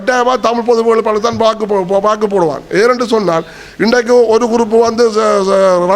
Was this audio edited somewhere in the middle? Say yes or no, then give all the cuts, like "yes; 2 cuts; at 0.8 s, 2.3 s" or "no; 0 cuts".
no; 0 cuts